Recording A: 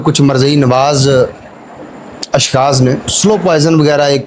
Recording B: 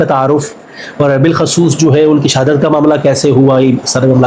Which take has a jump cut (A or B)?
A